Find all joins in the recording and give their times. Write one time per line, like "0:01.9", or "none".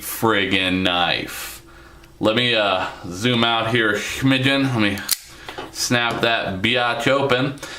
0:02.5